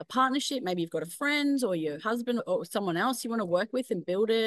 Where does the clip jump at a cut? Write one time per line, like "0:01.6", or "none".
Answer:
0:02.4